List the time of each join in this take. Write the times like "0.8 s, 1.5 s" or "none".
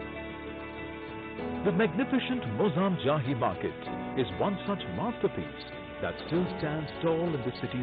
none